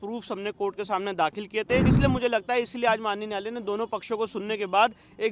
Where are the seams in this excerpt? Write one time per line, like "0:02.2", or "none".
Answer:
0:01.9